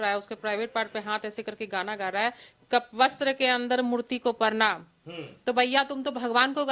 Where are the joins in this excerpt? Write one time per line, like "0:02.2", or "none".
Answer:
none